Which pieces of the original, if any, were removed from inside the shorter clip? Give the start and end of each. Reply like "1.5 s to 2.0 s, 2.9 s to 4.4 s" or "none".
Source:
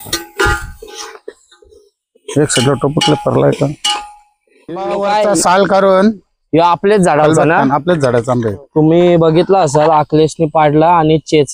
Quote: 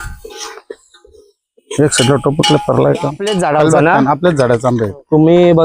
3.8 s to 6.9 s